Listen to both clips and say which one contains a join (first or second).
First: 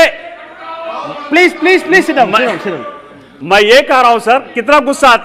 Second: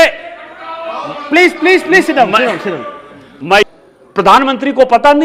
second